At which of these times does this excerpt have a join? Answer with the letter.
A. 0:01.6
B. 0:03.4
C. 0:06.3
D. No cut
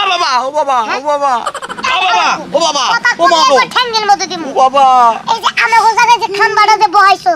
A